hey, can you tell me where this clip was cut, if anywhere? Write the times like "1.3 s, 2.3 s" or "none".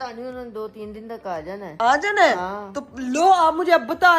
none